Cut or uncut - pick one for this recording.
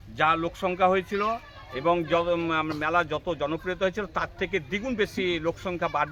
uncut